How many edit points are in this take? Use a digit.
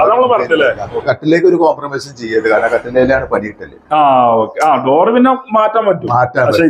1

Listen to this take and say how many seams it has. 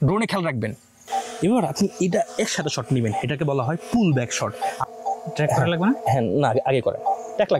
2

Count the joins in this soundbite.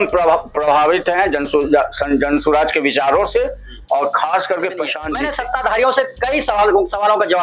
1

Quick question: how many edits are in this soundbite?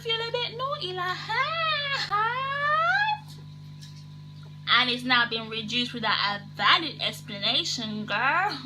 1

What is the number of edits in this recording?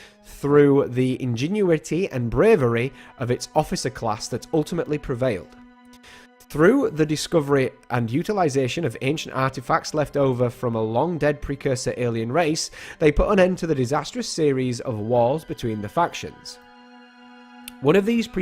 1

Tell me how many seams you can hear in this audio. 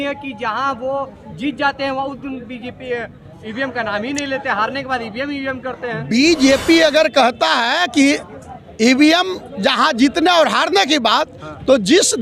0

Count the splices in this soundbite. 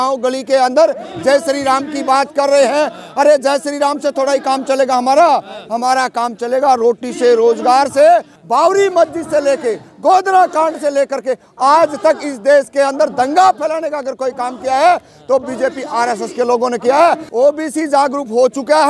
2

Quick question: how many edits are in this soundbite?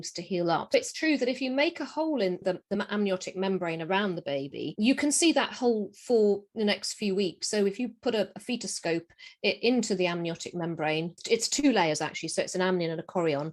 2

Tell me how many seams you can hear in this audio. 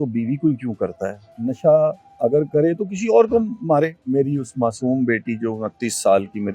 2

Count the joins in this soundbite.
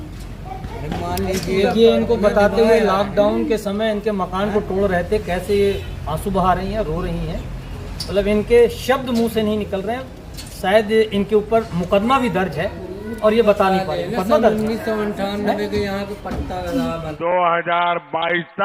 1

